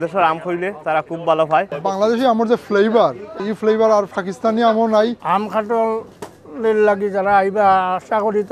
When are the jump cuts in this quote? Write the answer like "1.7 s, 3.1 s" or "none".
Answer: 1.7 s, 3.4 s, 5.2 s